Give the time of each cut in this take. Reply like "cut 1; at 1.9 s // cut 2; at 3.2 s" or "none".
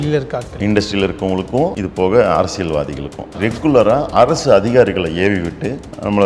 cut 1; at 1.8 s // cut 2; at 3.4 s